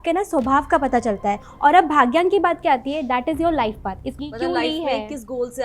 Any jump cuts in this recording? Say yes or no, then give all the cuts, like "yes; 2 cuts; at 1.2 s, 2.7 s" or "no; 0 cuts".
yes; 2 cuts; at 1.5 s, 4.1 s